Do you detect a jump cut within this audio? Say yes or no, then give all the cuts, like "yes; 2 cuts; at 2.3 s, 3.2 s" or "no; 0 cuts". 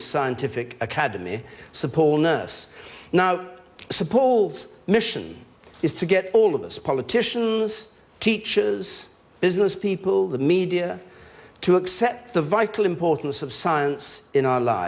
yes; 1 cut; at 8.0 s